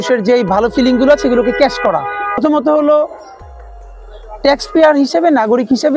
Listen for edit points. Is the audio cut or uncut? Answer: cut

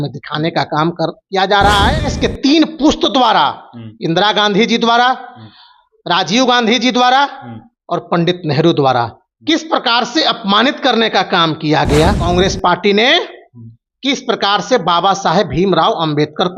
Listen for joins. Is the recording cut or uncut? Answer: cut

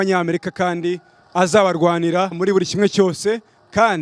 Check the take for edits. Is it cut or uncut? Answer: cut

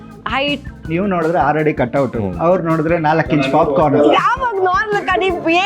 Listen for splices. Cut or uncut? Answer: cut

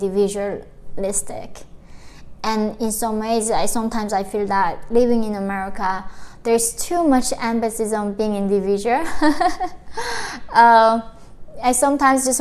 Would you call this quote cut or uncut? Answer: uncut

